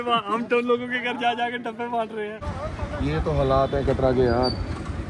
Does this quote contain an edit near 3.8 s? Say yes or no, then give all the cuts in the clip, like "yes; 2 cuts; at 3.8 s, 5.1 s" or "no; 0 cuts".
no; 1 cut; at 2.4 s